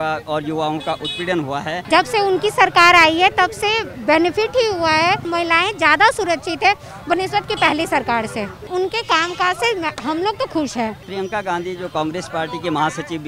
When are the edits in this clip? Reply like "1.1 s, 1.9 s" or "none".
1.8 s, 5.3 s, 8.6 s, 11.0 s